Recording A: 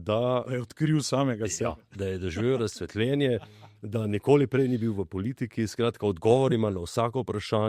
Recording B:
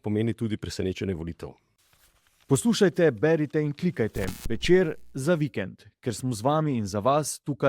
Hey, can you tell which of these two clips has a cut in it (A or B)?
B